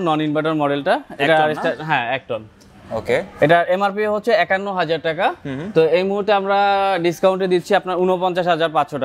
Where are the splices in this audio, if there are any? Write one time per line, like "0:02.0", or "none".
none